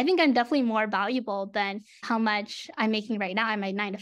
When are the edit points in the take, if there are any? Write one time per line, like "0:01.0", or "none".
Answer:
none